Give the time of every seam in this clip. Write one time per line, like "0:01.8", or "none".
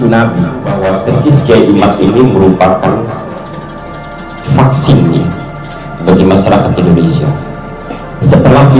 0:01.1